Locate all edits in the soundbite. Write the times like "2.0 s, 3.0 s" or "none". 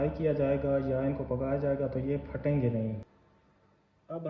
3.0 s